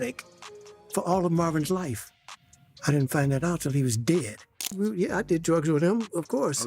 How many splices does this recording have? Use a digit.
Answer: 1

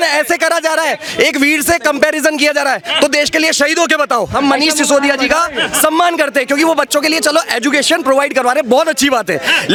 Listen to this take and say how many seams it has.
0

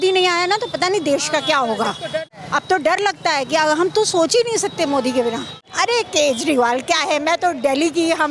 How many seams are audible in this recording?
2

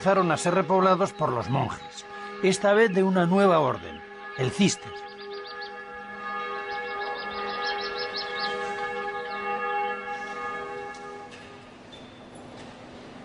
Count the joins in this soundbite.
1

